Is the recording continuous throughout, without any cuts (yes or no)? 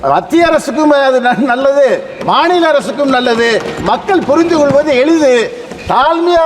yes